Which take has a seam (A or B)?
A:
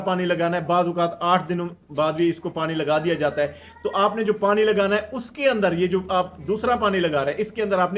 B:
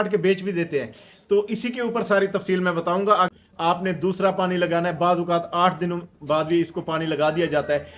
B